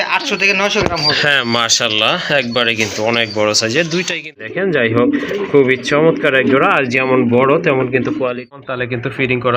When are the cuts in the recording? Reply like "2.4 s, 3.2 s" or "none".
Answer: 4.4 s, 8.6 s